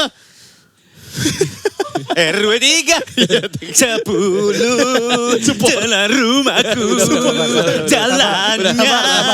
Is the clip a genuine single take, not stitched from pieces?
yes; 0 cuts

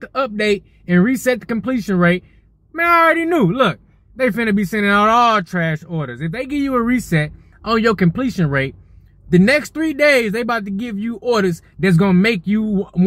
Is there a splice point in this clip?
no; 0 cuts

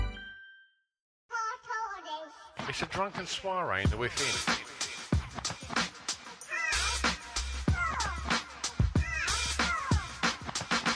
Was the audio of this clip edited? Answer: yes; 1 cut; at 1.1 s

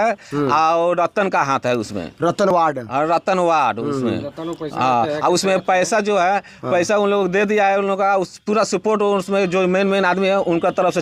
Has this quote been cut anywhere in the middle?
no; 0 cuts

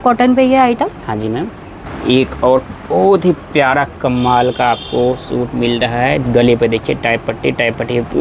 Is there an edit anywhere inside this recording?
yes; 1 cut; at 1.9 s

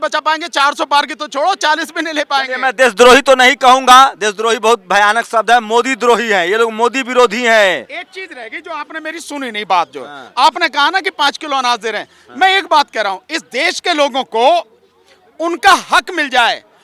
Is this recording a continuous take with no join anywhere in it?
yes; 0 cuts

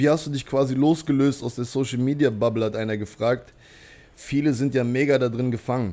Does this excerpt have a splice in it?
no; 0 cuts

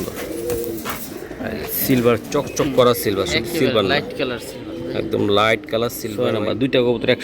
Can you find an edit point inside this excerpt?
yes; 1 cut; at 6.1 s

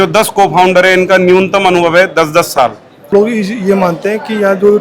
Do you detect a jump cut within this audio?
yes; 1 cut; at 3.1 s

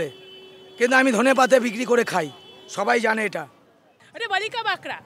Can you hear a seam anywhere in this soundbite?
yes; 1 cut; at 4.0 s

